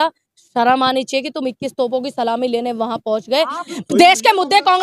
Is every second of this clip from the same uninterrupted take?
no; 1 cut; at 3.7 s

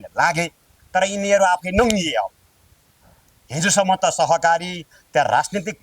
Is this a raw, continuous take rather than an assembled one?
yes; 0 cuts

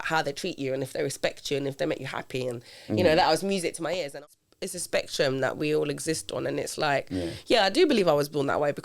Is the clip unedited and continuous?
no; 1 cut; at 4.1 s

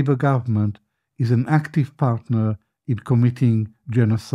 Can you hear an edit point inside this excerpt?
no; 0 cuts

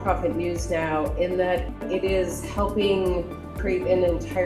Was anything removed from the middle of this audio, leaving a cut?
yes; 2 cuts; at 1.7 s, 3.6 s

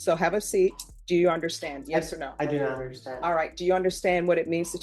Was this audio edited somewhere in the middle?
yes; 1 cut; at 0.9 s

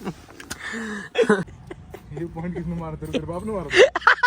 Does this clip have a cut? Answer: yes; 1 cut; at 1.5 s

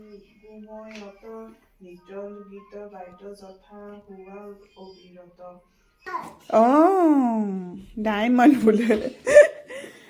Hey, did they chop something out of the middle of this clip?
yes; 1 cut; at 6.1 s

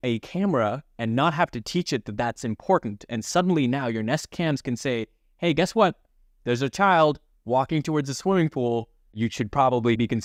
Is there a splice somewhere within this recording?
no; 0 cuts

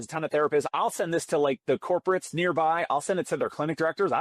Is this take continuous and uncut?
yes; 0 cuts

